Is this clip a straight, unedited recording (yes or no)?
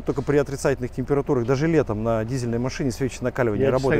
yes